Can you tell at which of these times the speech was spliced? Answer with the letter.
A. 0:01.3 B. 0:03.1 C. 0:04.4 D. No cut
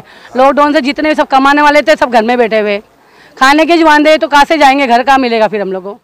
D